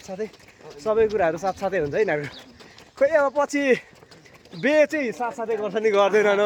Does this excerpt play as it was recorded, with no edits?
yes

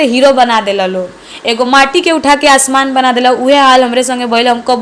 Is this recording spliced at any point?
no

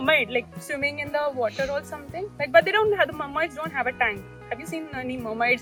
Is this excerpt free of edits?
yes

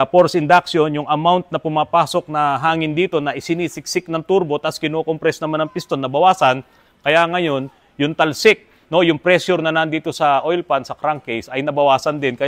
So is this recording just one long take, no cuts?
yes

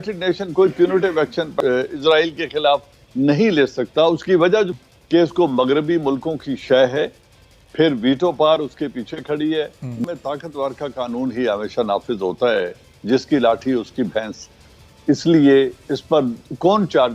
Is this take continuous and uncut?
no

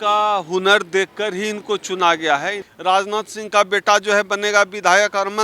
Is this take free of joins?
no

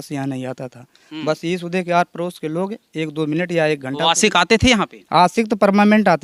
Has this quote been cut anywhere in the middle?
no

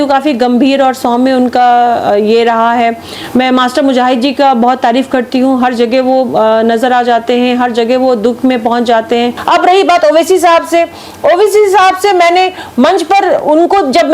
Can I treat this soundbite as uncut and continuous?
no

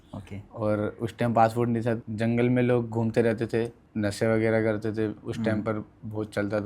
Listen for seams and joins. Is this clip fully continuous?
no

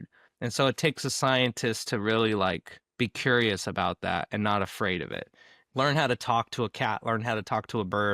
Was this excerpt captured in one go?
no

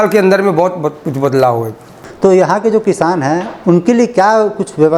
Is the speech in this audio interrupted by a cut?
yes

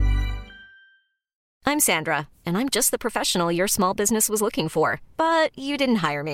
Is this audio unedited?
no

